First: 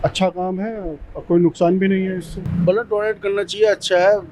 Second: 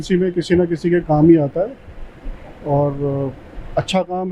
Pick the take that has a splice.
first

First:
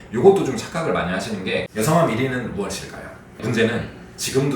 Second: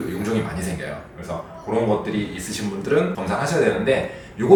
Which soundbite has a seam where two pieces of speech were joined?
first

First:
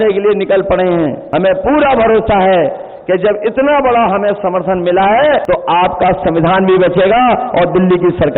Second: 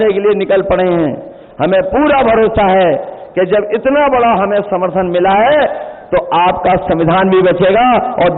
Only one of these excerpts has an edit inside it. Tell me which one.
first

